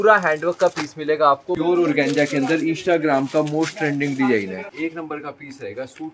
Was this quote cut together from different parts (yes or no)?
yes